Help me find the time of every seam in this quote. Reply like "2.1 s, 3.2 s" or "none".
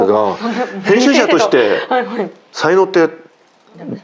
2.4 s

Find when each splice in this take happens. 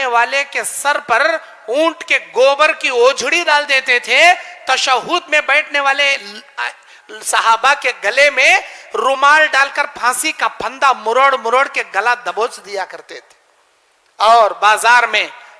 none

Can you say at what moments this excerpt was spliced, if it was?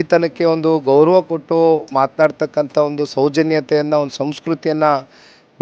none

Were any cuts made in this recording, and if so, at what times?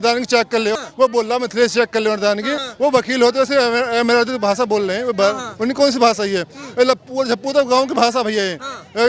0.8 s, 2.6 s

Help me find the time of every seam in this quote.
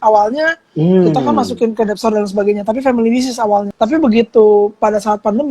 3.7 s

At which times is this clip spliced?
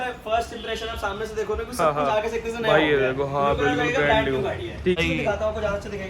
4.9 s

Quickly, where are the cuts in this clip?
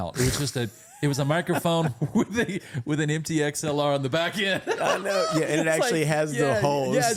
none

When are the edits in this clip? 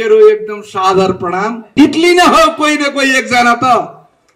1.7 s

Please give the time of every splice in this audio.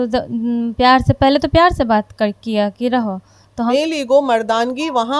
3.7 s

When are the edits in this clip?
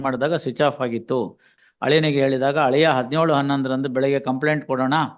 1.5 s

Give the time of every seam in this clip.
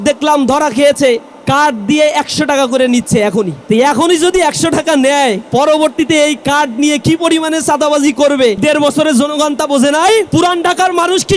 3.6 s, 5.4 s, 8.6 s, 10.3 s

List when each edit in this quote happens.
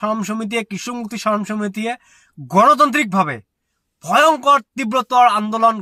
none

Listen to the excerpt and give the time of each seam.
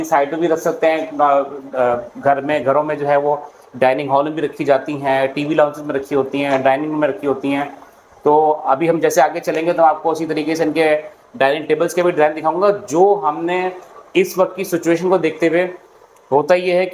none

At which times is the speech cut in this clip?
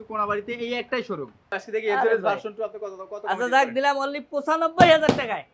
1.6 s

